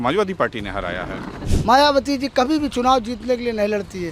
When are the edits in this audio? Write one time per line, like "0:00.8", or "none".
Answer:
0:01.4